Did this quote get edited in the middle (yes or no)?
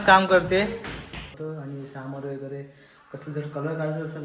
yes